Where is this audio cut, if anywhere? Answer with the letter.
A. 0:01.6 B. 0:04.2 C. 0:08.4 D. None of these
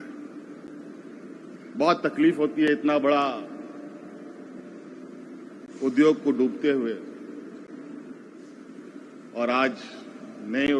C